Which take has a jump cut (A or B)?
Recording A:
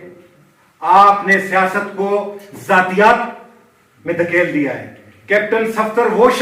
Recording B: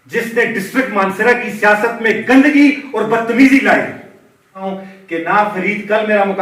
B